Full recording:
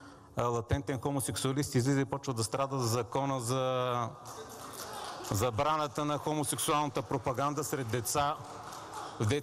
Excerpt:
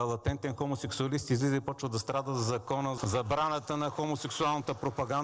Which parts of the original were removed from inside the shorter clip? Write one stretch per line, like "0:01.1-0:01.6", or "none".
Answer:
0:03.4-0:05.3